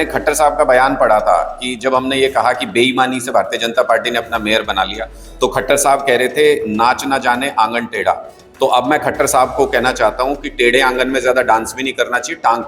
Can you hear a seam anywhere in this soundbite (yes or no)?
no